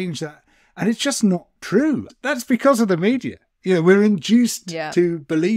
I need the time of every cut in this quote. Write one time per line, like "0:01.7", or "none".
0:02.1